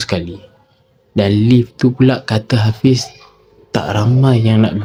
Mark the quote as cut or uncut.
uncut